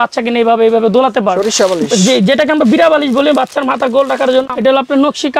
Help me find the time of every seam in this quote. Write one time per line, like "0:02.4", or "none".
0:01.4
0:04.5